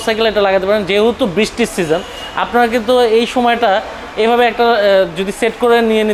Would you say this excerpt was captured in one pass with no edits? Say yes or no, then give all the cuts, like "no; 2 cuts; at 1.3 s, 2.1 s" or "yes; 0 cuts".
yes; 0 cuts